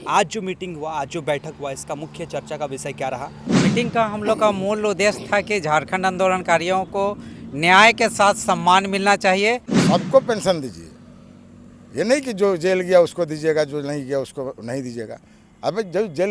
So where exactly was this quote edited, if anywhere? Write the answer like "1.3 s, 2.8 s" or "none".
3.5 s, 9.7 s